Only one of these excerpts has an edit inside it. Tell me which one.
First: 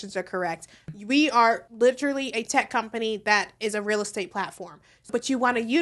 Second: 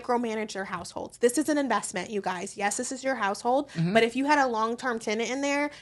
first; 3 cuts; at 0.9 s, 1.7 s, 5.1 s

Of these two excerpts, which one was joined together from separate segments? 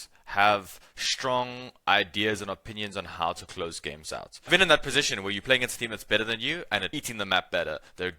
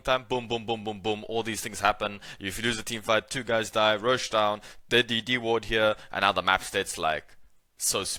first; 2 cuts; at 4.5 s, 7.0 s

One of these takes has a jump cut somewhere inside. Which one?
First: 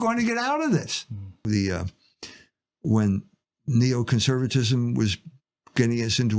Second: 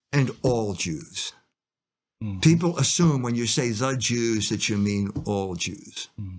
first; 1 cut; at 1.4 s

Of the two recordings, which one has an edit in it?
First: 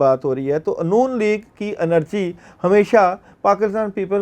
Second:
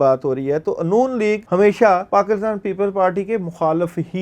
second; 2 cuts; at 1.4 s, 2.0 s

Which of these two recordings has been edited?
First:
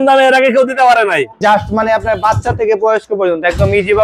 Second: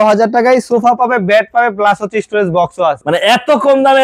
first; 1 cut; at 1.2 s

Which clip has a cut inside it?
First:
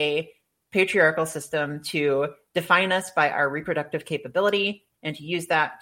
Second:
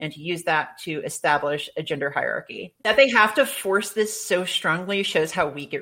second; 1 cut; at 2.9 s

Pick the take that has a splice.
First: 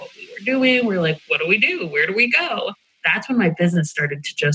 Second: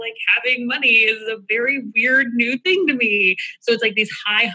first; 2 cuts; at 1.2 s, 2.9 s

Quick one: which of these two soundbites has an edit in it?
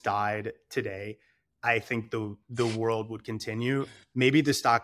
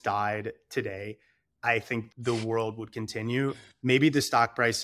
second; 1 cut; at 2.1 s

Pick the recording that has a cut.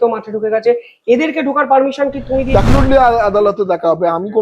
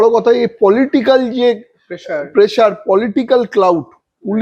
first; 1 cut; at 2.7 s

